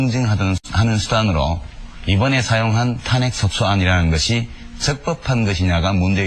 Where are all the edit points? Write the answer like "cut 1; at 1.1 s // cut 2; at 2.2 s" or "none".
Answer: cut 1; at 2.2 s